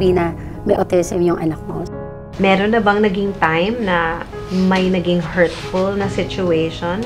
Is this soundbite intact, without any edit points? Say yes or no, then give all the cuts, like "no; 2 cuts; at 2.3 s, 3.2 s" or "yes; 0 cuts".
no; 2 cuts; at 2.0 s, 4.3 s